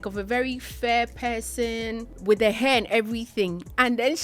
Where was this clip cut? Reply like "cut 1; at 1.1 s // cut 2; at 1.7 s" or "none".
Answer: cut 1; at 2.1 s